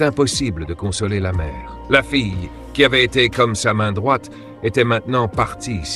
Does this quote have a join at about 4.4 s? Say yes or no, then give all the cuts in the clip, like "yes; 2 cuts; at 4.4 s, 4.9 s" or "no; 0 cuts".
no; 0 cuts